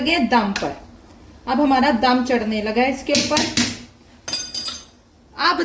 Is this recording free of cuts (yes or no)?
yes